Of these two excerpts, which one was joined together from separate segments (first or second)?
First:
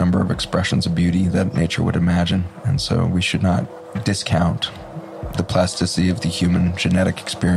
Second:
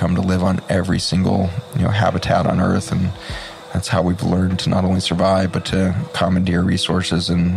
first